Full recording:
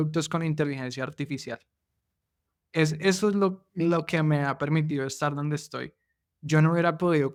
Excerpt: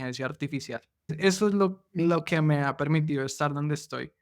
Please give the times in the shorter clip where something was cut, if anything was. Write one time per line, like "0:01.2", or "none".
0:01.1